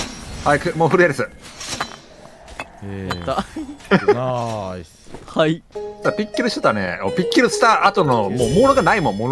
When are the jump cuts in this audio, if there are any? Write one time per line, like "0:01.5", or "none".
none

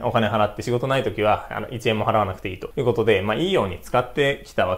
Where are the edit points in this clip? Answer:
none

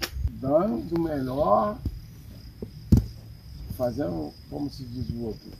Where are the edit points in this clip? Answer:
none

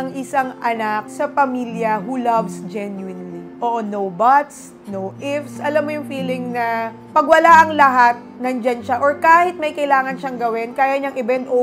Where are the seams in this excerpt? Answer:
none

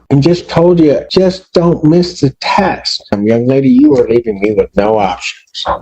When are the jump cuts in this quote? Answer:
0:01.0
0:03.2

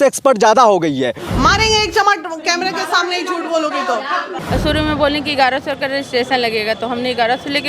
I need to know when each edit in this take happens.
0:01.2
0:04.4

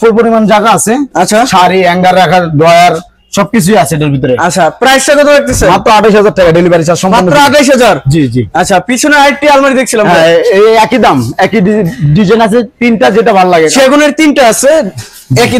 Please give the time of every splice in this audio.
none

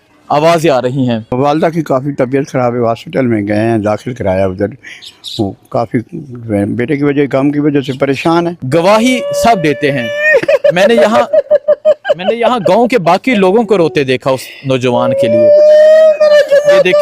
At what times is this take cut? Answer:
0:01.3
0:08.6

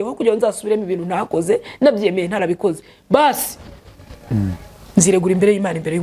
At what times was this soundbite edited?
none

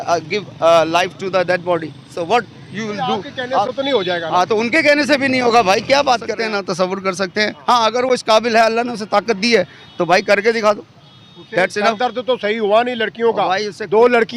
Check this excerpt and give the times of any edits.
0:06.3

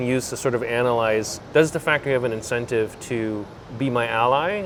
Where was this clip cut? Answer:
none

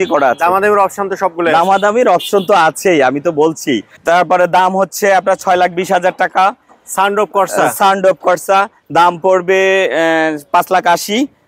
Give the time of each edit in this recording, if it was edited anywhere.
0:03.9

